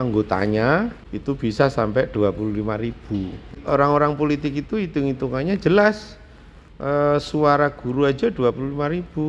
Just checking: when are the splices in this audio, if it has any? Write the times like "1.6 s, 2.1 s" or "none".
1.0 s, 3.6 s